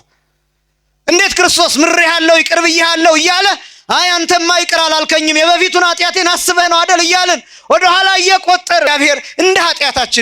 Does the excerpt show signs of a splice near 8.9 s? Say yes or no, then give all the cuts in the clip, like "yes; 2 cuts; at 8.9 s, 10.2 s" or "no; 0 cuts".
yes; 1 cut; at 8.9 s